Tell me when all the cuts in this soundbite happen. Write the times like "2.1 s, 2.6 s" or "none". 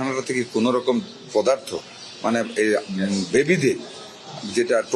none